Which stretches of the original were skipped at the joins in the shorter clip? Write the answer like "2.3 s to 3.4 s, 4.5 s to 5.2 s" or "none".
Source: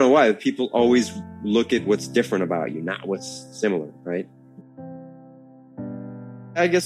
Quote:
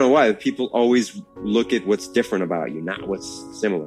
none